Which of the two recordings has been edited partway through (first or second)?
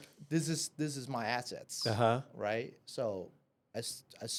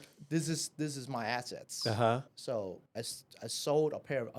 second